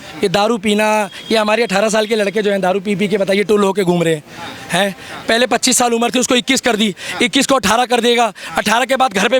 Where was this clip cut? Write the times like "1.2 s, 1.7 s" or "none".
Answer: none